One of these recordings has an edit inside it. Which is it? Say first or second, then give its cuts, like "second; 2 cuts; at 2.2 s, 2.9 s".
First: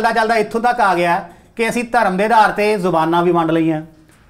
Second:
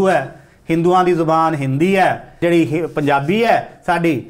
second; 1 cut; at 2.4 s